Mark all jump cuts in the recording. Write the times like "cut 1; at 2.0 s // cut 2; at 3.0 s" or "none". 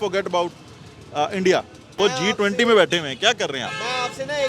cut 1; at 1.9 s